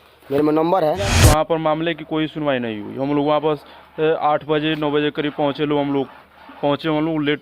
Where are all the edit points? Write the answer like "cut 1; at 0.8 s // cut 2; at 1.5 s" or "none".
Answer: cut 1; at 1.1 s